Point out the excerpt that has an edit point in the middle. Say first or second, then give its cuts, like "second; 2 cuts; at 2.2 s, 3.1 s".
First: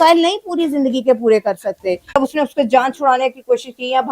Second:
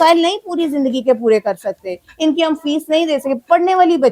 first; 1 cut; at 2.2 s